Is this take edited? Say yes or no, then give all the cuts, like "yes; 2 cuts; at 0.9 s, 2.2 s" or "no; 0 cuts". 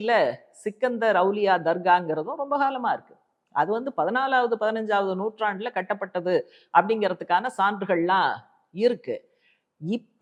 no; 0 cuts